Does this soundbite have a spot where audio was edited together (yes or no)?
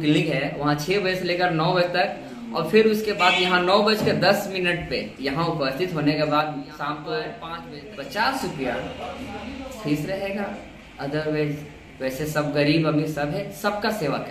yes